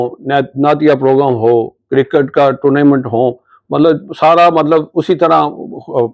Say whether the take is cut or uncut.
uncut